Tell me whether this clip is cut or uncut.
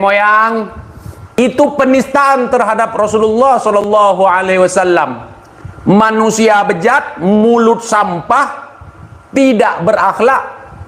cut